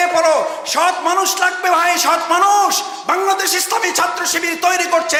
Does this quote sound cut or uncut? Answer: uncut